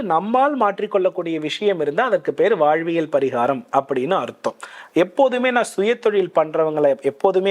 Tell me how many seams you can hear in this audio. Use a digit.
0